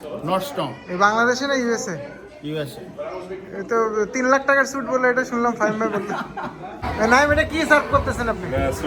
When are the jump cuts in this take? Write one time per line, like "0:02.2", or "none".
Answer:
0:06.9